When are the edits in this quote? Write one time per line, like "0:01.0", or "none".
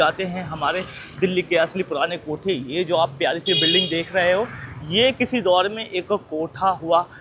none